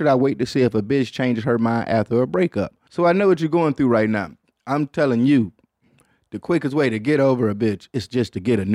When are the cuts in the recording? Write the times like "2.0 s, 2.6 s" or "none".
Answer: 2.8 s